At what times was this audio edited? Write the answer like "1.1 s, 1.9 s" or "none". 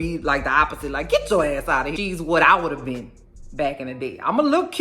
2.0 s